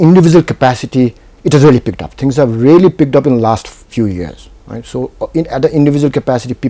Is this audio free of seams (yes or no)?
yes